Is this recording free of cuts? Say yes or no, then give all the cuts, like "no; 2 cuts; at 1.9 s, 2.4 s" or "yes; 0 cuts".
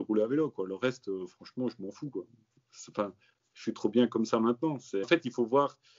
no; 1 cut; at 5.1 s